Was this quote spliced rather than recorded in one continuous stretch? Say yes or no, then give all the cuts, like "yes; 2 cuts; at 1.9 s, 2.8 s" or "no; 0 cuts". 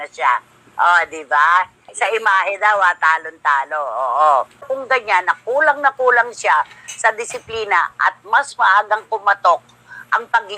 yes; 1 cut; at 4.7 s